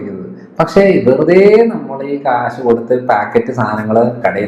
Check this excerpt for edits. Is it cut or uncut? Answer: uncut